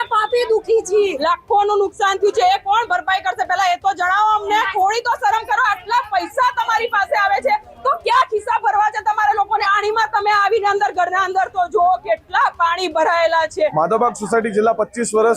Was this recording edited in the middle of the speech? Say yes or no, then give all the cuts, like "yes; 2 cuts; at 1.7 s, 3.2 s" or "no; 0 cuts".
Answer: yes; 4 cuts; at 1.2 s, 4.7 s, 9.6 s, 13.7 s